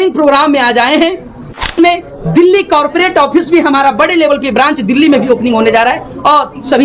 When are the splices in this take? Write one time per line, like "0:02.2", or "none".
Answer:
0:01.7